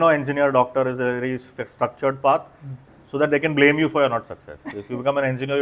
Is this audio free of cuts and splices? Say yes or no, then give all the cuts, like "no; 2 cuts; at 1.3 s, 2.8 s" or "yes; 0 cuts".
yes; 0 cuts